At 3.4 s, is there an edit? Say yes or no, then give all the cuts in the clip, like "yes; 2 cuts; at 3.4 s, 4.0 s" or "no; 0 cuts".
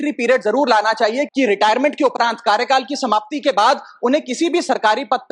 no; 1 cut; at 1.3 s